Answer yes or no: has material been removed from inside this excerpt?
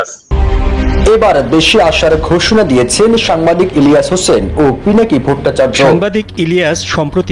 yes